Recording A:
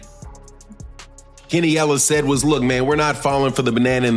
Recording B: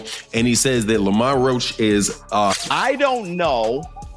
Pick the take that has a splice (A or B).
B